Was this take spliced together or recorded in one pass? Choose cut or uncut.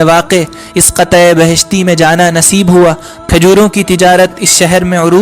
cut